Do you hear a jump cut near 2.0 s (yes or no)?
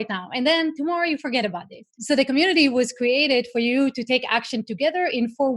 yes